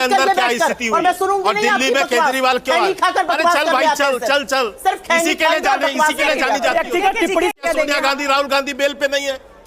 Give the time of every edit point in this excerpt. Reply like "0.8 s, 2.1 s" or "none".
7.7 s